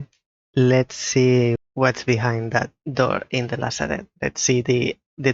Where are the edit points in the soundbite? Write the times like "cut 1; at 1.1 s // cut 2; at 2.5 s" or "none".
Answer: cut 1; at 1.6 s // cut 2; at 2.8 s // cut 3; at 4.1 s